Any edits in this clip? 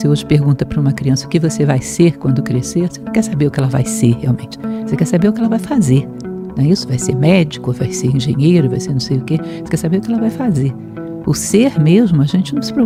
no; 0 cuts

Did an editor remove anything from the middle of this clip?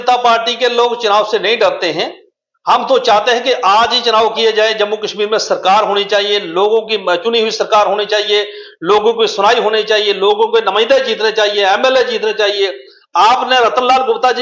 no; 0 cuts

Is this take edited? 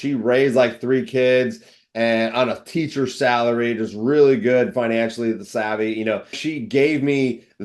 yes; 1 cut; at 6.4 s

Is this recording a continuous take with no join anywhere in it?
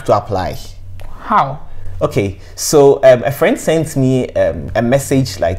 yes; 0 cuts

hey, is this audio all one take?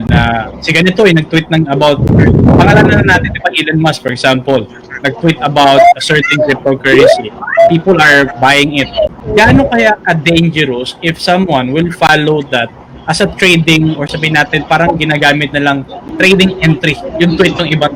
no; 2 cuts; at 9.2 s, 17.1 s

